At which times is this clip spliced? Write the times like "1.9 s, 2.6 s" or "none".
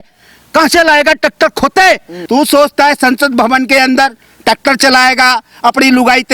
2.1 s